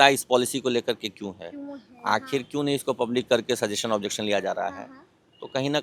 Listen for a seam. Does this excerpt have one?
no; 0 cuts

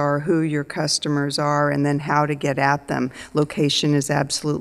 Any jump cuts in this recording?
yes; 1 cut; at 3.2 s

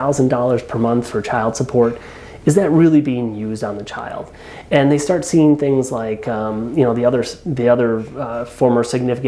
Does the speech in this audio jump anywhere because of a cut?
no; 0 cuts

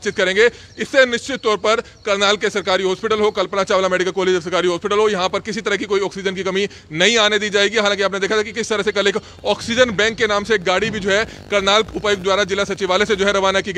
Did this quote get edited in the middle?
no; 0 cuts

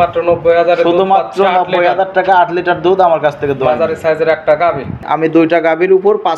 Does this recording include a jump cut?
yes; 1 cut; at 5.0 s

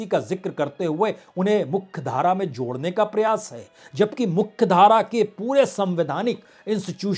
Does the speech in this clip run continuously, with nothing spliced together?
yes; 0 cuts

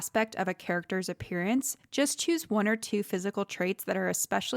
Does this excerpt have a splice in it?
no; 0 cuts

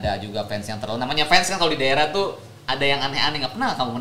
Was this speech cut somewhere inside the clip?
no; 0 cuts

